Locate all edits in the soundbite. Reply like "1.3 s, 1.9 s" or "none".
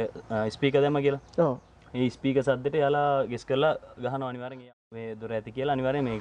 4.7 s